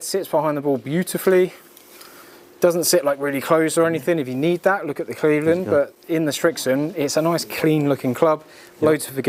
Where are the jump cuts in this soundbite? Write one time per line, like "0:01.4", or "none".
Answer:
none